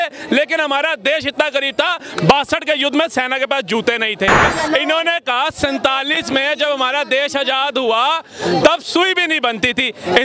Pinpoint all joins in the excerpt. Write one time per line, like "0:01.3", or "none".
0:04.4